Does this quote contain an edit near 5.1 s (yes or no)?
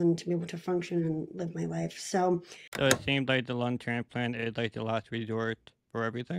no